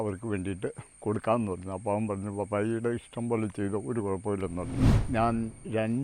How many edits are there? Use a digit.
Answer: 1